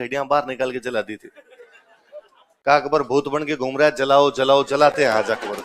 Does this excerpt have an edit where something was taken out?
no; 0 cuts

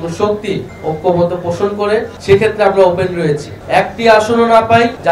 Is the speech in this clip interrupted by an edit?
yes; 2 cuts; at 2.1 s, 3.5 s

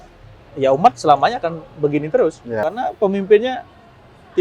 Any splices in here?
yes; 1 cut; at 2.6 s

